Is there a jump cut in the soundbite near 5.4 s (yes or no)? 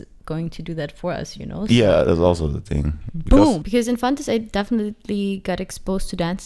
no